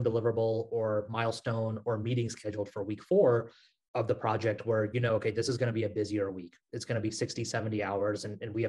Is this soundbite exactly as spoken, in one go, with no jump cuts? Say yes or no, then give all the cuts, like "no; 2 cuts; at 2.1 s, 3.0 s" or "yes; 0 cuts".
yes; 0 cuts